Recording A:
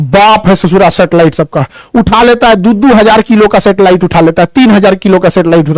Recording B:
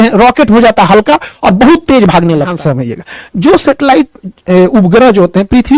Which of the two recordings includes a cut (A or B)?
B